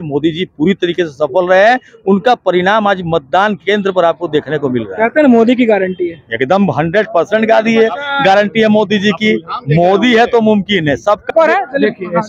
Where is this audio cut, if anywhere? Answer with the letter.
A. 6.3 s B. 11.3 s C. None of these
B